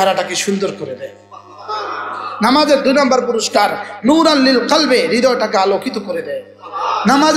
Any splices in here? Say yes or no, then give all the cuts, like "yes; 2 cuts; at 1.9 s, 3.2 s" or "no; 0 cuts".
no; 0 cuts